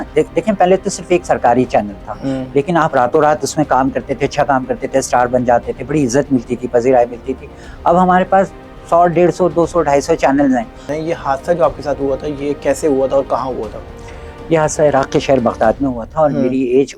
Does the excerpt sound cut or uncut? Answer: cut